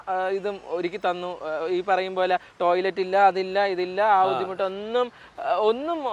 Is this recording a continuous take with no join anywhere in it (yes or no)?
yes